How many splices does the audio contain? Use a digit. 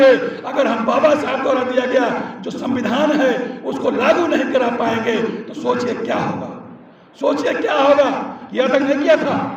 1